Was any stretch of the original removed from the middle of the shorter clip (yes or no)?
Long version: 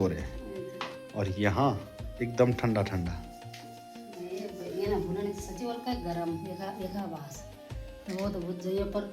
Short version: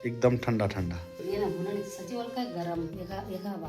yes